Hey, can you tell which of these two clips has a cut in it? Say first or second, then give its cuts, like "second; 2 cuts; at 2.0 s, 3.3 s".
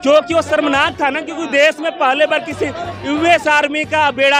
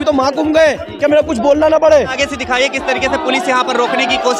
second; 1 cut; at 2.2 s